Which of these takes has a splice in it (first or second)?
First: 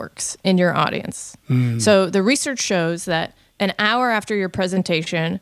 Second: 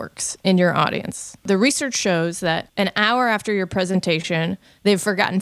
second